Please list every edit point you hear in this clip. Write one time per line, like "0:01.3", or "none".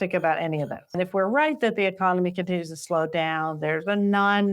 0:01.0